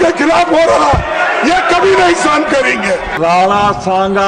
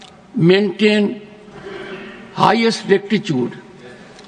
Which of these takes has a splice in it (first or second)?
first